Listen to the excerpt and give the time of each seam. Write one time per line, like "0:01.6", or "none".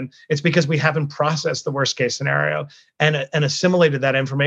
none